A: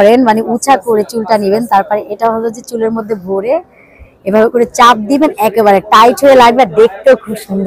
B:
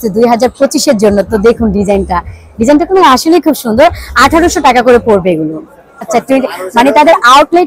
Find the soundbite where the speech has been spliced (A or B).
B